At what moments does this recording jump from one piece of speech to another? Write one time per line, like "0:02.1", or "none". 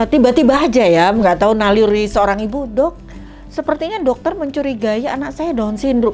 none